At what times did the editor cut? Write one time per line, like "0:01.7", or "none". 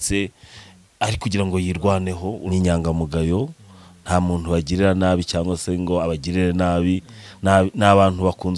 0:02.3